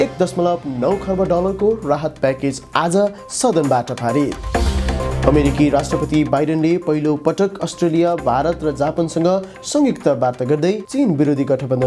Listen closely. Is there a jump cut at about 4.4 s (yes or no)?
yes